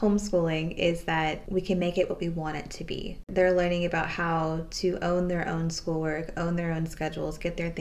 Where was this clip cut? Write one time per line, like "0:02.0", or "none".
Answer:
0:03.2